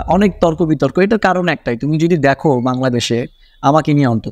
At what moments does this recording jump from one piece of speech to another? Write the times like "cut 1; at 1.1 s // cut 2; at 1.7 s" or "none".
none